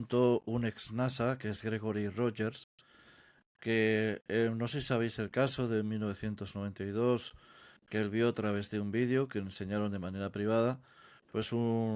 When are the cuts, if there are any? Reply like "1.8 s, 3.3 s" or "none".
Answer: none

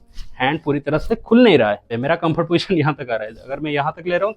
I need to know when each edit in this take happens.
1.9 s

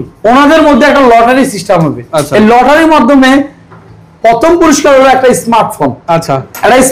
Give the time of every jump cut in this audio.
none

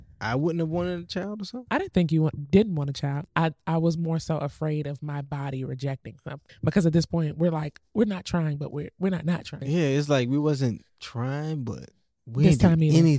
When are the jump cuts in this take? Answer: 3.2 s, 6.5 s, 9.6 s

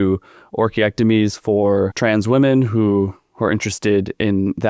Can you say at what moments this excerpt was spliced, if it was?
none

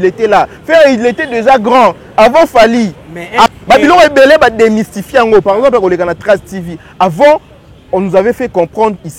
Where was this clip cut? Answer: 3.5 s

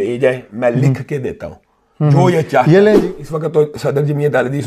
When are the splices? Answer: 3.0 s

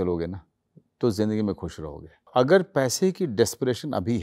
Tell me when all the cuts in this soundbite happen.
2.3 s

